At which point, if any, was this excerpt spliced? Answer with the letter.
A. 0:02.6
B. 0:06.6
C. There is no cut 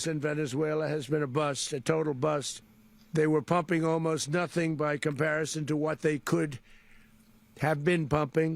A